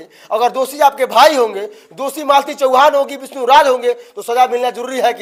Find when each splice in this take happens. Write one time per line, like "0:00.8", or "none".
none